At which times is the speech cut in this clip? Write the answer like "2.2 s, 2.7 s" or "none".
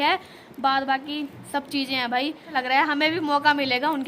2.5 s